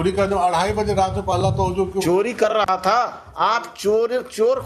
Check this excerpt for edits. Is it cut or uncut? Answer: cut